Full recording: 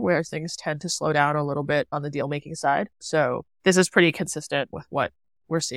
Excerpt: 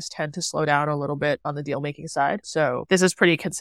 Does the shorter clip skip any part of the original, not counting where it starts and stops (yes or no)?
yes